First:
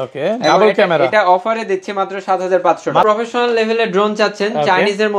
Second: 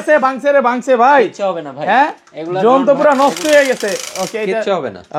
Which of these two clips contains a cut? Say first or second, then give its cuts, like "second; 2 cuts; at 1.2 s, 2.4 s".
first; 1 cut; at 3.0 s